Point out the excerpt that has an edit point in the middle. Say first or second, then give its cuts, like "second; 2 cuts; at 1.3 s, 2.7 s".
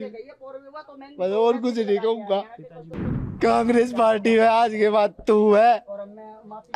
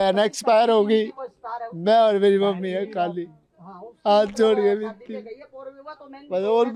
first; 1 cut; at 3.3 s